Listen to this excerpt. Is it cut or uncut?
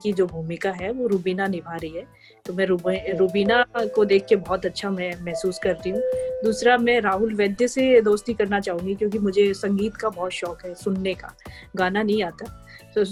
uncut